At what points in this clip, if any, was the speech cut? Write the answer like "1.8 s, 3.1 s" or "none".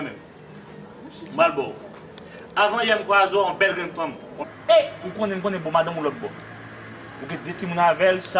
none